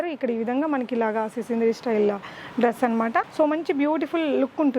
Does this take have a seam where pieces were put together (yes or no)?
yes